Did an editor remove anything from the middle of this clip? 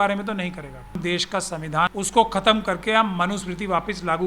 yes; 2 cuts; at 1.0 s, 1.9 s

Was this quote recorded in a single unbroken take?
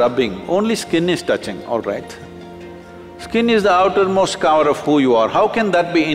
yes; 0 cuts

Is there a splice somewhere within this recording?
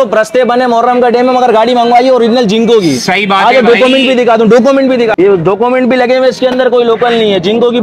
yes; 1 cut; at 5.1 s

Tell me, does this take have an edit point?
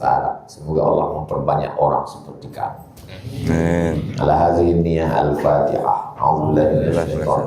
no; 0 cuts

